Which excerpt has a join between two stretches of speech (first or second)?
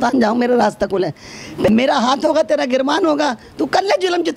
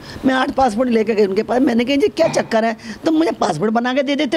first